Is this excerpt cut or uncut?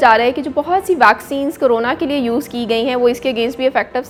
uncut